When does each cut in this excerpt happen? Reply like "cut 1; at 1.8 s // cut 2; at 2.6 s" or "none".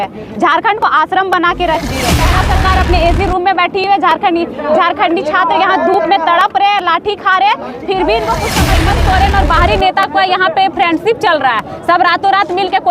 cut 1; at 2.3 s // cut 2; at 8.7 s